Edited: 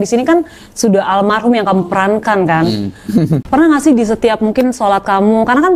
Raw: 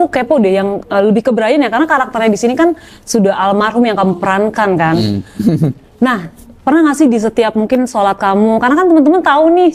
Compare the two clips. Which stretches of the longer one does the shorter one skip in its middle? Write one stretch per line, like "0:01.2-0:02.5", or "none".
0:05.7-0:06.6